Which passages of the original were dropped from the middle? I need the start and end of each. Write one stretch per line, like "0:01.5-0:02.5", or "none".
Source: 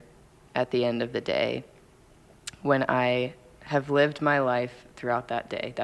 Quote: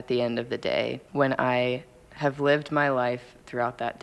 0:01.7-0:02.5